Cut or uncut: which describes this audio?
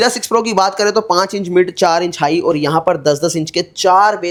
uncut